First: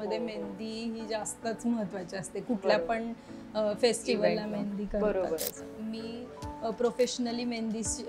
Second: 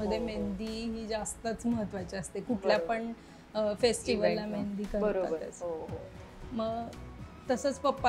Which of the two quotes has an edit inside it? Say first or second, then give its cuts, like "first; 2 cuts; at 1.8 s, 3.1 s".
first; 1 cut; at 5.6 s